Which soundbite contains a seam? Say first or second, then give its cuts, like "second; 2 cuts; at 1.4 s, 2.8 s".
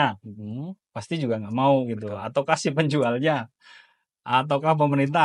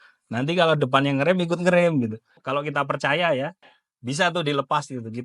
second; 1 cut; at 2.3 s